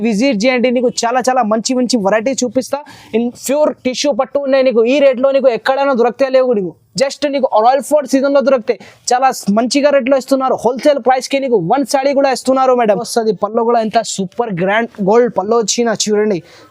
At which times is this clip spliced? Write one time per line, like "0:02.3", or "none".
0:03.4
0:13.1